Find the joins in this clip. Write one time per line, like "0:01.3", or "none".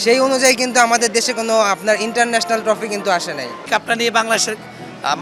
0:03.6